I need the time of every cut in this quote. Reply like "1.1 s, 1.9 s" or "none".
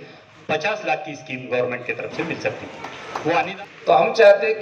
3.5 s